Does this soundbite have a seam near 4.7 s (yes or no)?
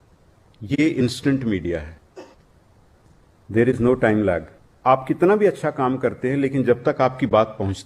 yes